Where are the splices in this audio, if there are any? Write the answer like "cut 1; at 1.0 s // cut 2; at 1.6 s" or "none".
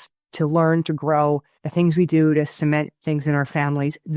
cut 1; at 1.6 s